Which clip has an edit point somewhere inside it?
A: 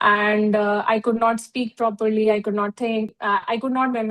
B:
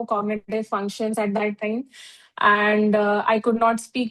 A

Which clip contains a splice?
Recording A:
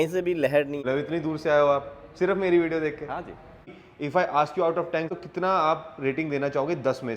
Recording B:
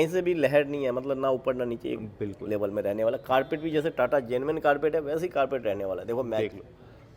A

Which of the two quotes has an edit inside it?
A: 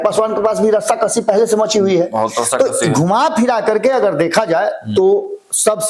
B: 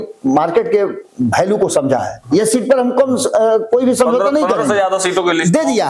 B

